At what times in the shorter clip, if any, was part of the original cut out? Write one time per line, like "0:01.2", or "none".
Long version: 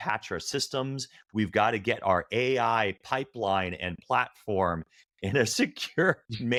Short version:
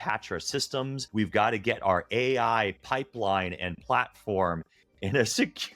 0:01.0